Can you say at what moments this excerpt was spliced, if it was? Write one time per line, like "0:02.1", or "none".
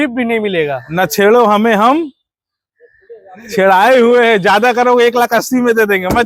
none